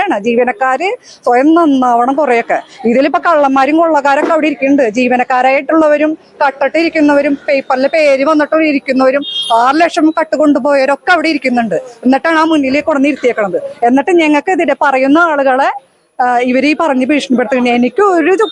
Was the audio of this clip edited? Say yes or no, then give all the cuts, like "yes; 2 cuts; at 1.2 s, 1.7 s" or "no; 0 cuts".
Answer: no; 0 cuts